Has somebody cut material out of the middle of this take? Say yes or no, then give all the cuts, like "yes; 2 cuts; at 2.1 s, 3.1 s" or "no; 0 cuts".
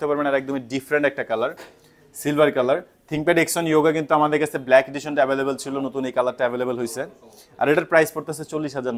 no; 0 cuts